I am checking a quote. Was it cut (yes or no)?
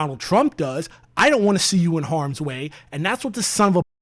no